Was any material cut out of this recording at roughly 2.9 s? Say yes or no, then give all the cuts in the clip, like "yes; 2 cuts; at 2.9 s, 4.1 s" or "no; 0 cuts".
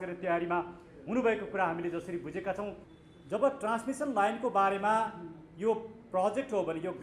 yes; 1 cut; at 2.9 s